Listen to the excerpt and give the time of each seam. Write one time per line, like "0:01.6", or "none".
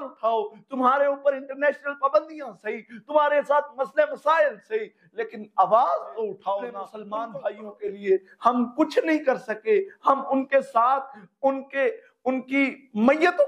0:06.9